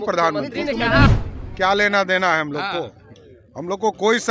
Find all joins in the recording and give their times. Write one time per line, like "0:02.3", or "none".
0:01.1